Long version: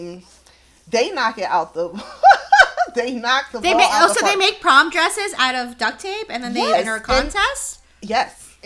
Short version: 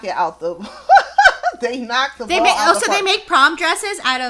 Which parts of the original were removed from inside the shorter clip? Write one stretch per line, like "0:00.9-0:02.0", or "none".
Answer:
none